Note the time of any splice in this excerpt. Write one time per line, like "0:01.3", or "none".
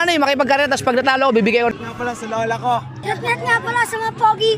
0:01.7
0:02.9